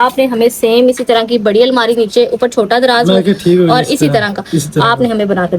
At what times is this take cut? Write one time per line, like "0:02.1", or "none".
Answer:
none